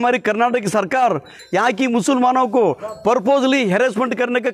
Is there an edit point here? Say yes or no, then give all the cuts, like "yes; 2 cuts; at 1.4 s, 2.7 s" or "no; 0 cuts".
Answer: no; 0 cuts